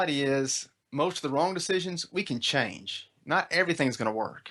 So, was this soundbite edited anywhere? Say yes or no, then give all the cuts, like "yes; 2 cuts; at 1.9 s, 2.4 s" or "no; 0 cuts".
no; 0 cuts